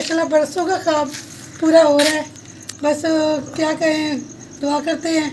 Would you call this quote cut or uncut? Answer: uncut